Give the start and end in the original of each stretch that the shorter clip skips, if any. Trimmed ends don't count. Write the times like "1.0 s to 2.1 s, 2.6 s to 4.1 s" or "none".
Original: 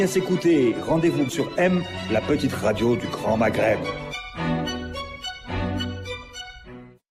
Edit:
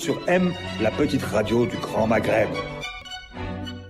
4.2 s to 5.1 s